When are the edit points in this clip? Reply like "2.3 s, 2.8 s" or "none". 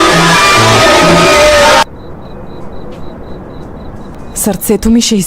4.1 s